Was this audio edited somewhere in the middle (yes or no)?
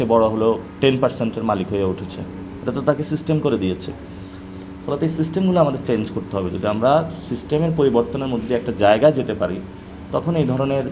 no